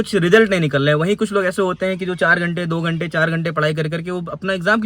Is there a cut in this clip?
no; 0 cuts

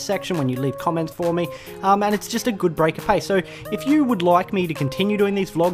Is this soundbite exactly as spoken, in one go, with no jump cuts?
no; 1 cut; at 4.8 s

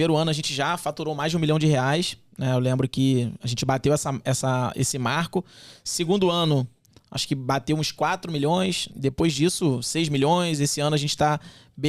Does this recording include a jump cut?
yes; 1 cut; at 8.9 s

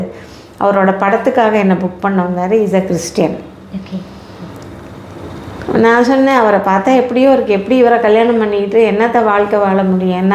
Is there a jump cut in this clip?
no; 0 cuts

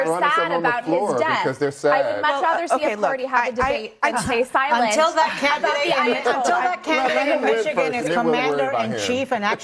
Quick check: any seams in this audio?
yes; 1 cut; at 3.9 s

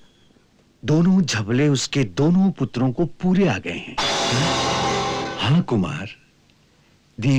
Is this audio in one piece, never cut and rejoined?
yes; 0 cuts

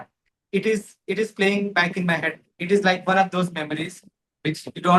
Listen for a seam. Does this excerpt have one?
no; 0 cuts

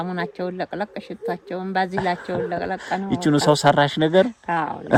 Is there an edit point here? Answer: no; 0 cuts

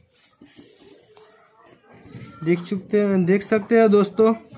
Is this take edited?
no; 0 cuts

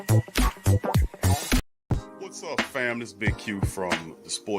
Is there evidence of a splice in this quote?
yes; 1 cut; at 1.9 s

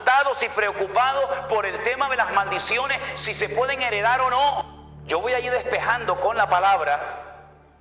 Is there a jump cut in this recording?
yes; 1 cut; at 4.7 s

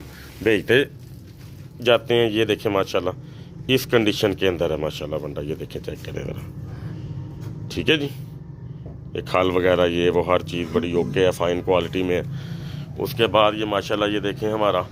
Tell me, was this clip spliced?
no; 0 cuts

